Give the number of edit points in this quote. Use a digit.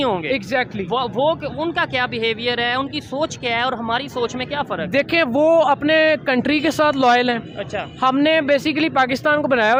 0